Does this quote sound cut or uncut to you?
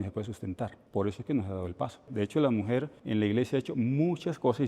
cut